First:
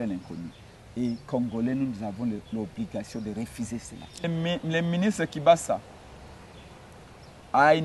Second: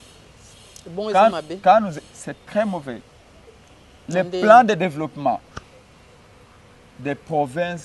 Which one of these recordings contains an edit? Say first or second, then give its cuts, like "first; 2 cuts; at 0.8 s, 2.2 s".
first; 1 cut; at 4.3 s